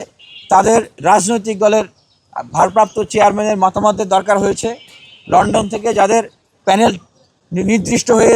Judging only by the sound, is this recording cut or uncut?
cut